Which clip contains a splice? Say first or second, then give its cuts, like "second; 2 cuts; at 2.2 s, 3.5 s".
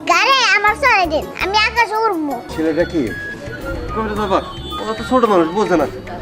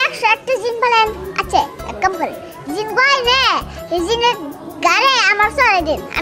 first; 1 cut; at 2.5 s